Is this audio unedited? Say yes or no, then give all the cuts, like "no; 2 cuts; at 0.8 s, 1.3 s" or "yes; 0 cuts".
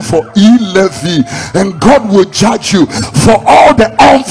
yes; 0 cuts